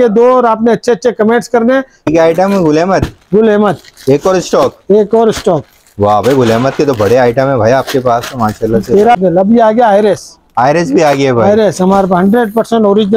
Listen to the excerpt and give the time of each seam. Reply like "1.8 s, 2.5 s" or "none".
1.9 s, 9.2 s